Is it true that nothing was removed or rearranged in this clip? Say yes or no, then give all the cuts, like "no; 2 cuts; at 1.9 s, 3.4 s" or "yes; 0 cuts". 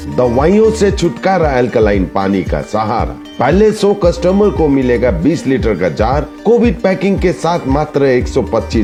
yes; 0 cuts